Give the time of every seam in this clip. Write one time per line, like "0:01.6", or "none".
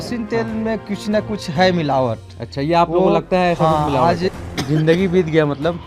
0:04.3

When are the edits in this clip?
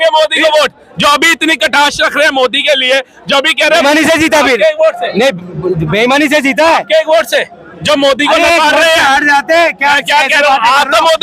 0:03.8

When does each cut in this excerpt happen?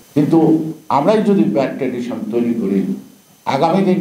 none

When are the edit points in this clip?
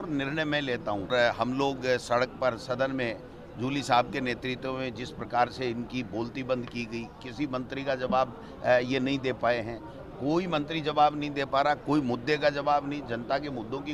0:01.1

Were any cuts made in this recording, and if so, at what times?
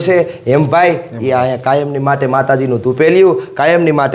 none

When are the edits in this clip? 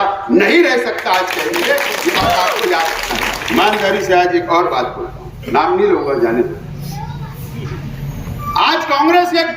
0:03.4

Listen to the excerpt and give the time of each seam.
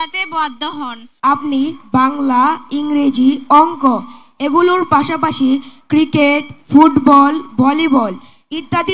0:01.0

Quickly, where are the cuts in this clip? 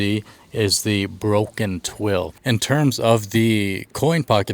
0:02.3

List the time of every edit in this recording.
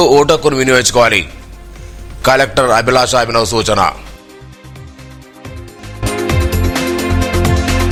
none

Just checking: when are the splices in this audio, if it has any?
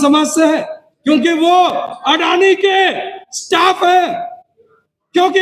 none

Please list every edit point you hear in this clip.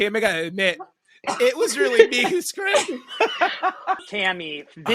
0:04.0

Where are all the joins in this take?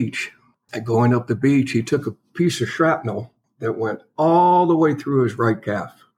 none

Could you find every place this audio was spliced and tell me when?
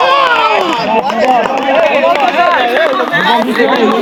none

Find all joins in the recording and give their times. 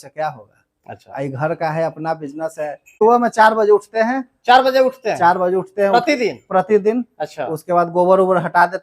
0:02.8

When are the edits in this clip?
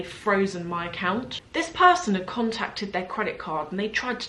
0:01.4

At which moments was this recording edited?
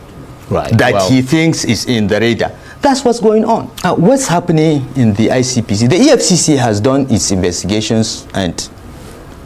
0:03.8

